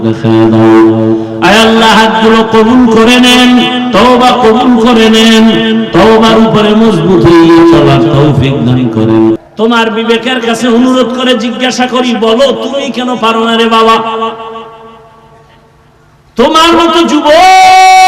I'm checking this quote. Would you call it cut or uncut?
cut